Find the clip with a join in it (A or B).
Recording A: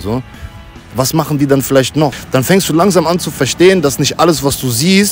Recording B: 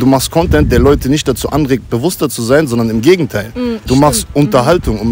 A